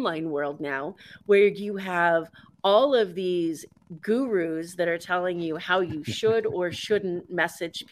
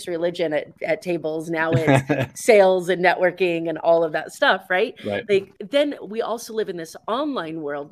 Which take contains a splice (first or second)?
second